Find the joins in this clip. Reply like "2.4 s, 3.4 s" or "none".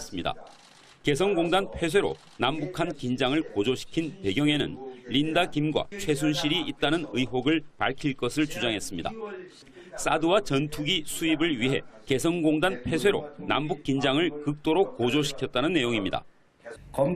6.1 s